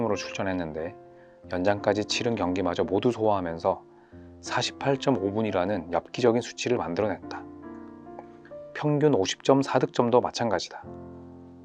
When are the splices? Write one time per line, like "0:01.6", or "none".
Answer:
0:07.2
0:08.7